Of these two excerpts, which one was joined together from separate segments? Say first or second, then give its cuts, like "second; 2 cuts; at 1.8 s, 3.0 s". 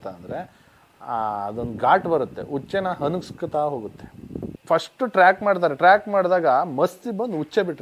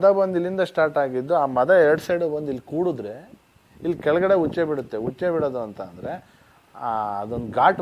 first; 1 cut; at 4.5 s